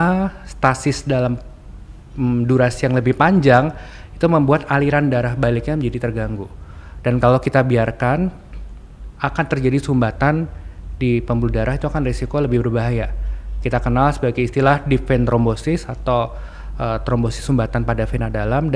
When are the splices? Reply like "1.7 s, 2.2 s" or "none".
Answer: none